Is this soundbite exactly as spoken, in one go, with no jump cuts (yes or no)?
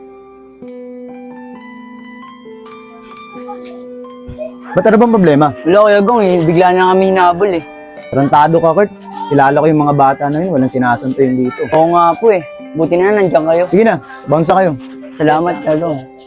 no